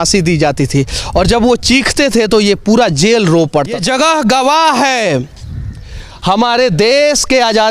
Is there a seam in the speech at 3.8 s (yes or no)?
yes